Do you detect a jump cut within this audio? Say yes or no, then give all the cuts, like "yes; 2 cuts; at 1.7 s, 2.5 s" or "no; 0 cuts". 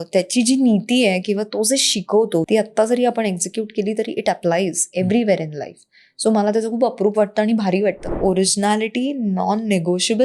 yes; 2 cuts; at 2.5 s, 8.1 s